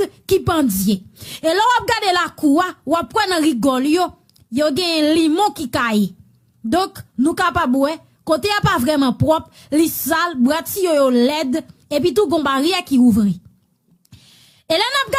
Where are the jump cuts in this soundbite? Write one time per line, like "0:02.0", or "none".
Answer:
none